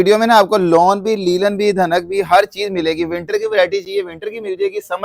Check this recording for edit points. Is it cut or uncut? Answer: uncut